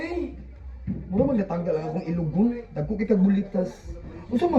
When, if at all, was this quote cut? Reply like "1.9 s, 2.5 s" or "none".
none